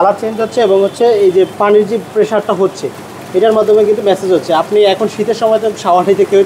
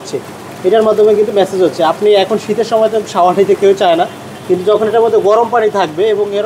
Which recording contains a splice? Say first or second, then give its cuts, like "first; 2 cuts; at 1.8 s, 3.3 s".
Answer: first; 1 cut; at 1.5 s